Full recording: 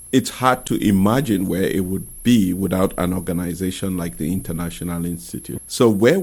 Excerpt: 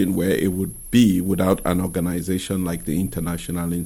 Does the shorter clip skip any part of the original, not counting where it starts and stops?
no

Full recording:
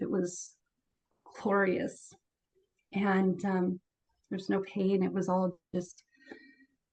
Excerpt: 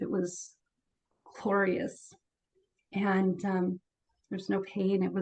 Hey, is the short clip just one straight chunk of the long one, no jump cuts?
yes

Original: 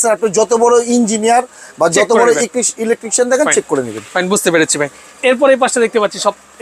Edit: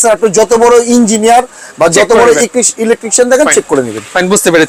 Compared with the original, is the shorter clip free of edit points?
yes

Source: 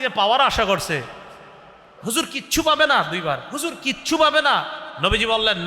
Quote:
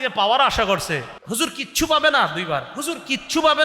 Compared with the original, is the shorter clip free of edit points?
no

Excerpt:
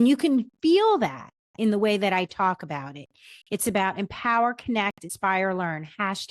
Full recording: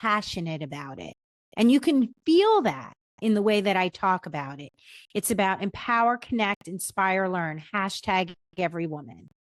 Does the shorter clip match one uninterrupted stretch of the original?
no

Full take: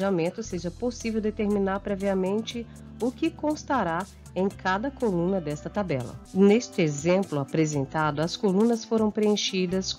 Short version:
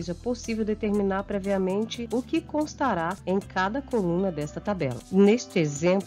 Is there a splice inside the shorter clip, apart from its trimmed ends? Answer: yes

